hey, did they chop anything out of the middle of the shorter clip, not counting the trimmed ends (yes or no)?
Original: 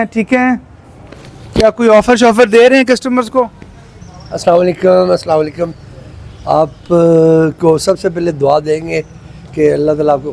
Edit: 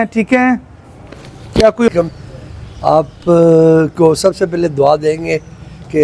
yes